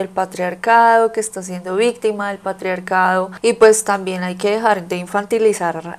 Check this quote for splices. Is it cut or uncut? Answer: uncut